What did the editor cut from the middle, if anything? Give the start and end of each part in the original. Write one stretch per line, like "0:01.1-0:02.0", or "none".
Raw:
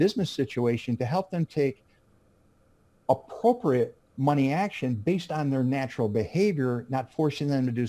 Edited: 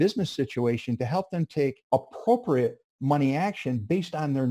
0:01.8-0:03.0